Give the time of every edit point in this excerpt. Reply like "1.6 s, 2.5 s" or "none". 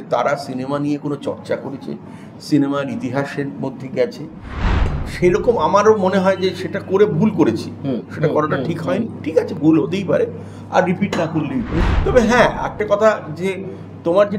4.7 s, 11.7 s